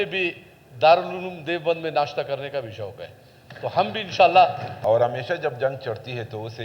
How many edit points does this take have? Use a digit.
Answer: 1